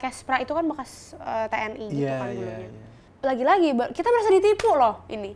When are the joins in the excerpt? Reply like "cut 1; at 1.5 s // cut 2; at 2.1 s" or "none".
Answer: cut 1; at 3.1 s